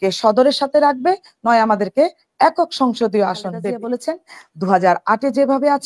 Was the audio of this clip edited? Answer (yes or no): yes